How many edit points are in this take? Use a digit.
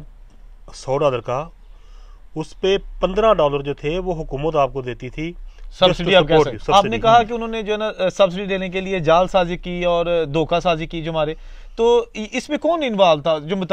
1